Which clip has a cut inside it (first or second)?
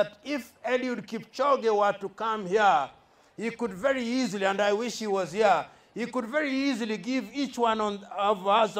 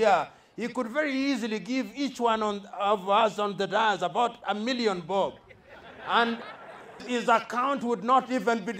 second